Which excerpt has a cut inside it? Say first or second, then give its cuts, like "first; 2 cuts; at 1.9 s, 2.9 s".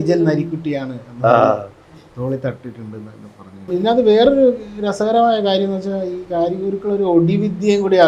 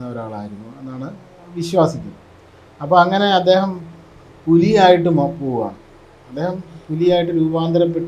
first; 1 cut; at 3.7 s